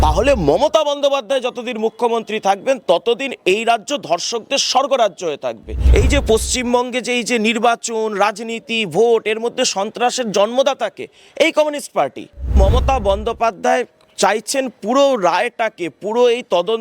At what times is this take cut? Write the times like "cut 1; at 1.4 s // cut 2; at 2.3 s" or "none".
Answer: cut 1; at 5.7 s // cut 2; at 12.6 s